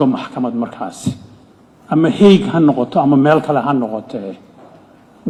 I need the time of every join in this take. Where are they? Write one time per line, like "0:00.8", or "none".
none